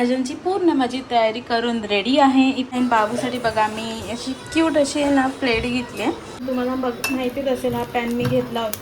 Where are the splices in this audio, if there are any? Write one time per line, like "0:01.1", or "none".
0:02.7
0:06.4